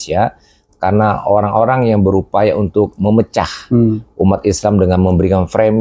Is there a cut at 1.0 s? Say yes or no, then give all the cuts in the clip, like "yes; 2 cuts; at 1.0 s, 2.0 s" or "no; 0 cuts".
no; 0 cuts